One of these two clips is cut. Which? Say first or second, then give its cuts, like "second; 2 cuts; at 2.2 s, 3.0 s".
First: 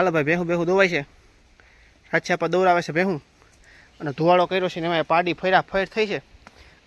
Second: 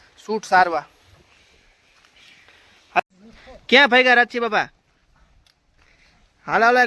second; 1 cut; at 3.0 s